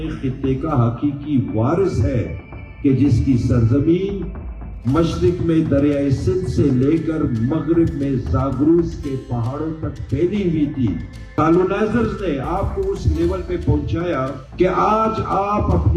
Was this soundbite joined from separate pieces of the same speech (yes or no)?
yes